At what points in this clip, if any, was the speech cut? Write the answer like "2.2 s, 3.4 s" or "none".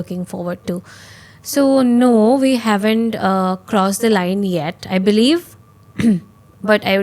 none